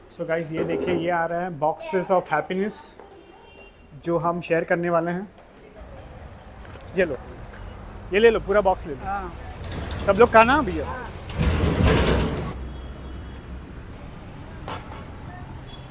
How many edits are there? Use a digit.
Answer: 3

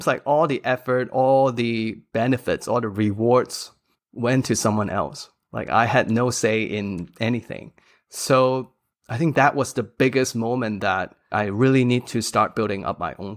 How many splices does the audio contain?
1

